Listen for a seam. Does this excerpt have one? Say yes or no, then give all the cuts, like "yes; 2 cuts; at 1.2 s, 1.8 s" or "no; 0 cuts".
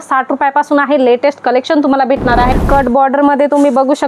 yes; 1 cut; at 2.5 s